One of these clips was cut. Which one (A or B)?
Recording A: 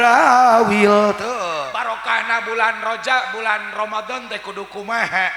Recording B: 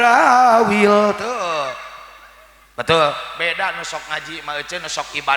A